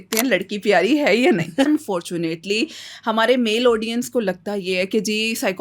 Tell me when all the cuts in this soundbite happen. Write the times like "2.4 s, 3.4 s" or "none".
1.7 s